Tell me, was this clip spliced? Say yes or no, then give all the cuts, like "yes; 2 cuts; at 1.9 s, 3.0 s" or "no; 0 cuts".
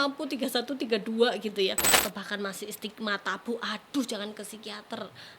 yes; 1 cut; at 2.0 s